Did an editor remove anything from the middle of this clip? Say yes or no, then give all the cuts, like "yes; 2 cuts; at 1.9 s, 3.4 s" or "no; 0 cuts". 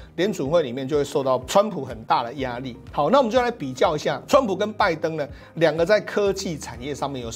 no; 0 cuts